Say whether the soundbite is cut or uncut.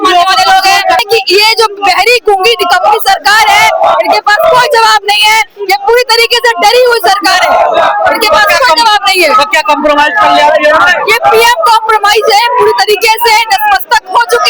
cut